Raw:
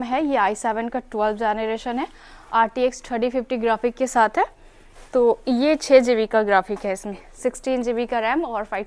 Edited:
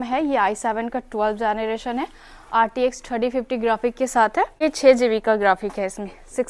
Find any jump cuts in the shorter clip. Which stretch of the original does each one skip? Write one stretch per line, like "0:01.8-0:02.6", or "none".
0:04.6-0:05.7